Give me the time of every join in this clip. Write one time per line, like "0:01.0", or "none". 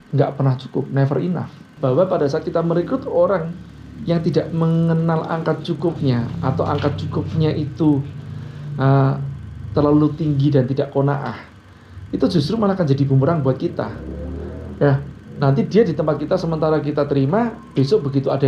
0:01.7